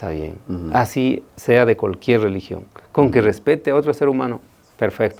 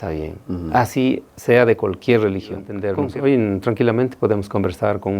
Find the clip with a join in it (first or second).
second